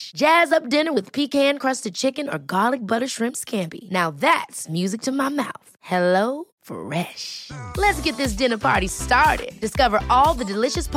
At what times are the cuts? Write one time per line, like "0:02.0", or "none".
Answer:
none